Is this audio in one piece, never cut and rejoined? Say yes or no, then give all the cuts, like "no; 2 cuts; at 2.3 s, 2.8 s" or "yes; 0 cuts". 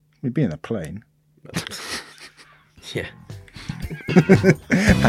yes; 0 cuts